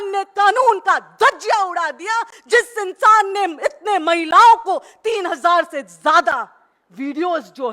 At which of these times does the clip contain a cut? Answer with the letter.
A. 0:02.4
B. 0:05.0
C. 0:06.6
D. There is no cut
D